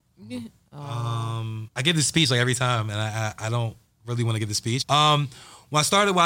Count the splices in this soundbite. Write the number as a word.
two